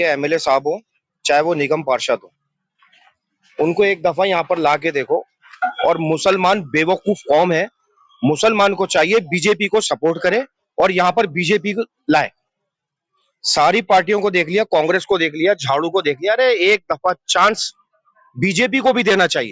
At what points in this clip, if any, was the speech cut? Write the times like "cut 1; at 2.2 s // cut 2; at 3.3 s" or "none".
none

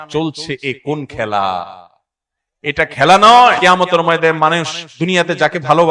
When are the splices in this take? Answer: cut 1; at 3.6 s

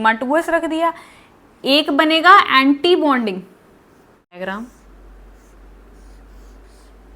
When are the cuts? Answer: cut 1; at 4.4 s

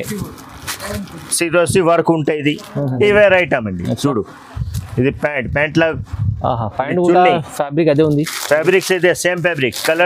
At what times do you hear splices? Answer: cut 1; at 3.0 s

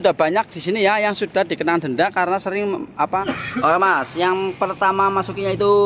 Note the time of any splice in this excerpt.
cut 1; at 3.2 s

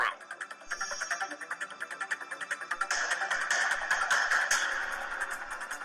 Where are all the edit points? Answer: cut 1; at 2.9 s

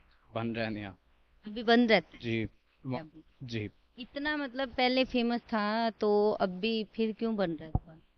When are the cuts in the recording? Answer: cut 1; at 3.0 s

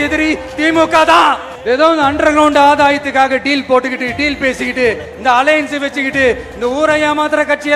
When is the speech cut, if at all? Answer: cut 1; at 1.5 s

